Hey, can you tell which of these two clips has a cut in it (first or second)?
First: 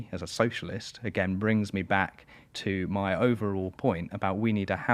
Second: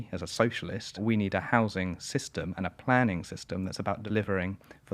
second